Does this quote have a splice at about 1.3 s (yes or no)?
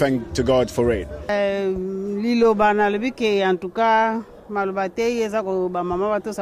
yes